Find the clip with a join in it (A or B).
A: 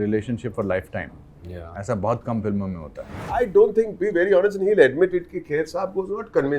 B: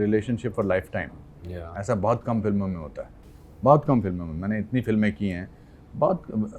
A